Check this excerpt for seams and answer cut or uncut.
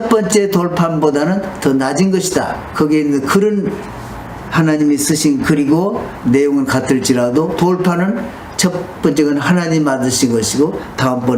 uncut